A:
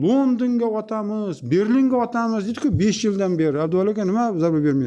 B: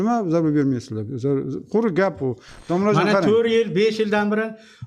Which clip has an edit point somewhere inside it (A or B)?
B